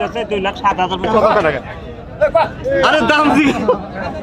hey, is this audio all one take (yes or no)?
no